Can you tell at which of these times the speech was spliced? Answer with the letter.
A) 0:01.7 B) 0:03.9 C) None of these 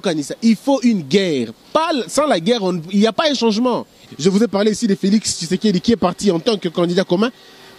B